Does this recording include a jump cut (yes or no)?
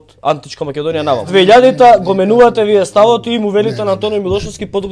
yes